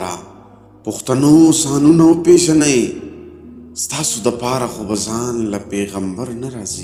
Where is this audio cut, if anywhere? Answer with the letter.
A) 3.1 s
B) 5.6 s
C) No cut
C